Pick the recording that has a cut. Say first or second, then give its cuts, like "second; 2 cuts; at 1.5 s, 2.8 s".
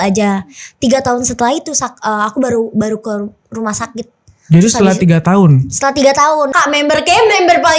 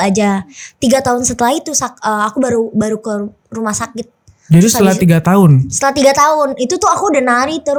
first; 1 cut; at 6.5 s